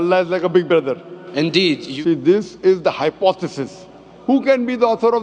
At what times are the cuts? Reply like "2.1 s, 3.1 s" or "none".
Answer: 1.9 s, 4.1 s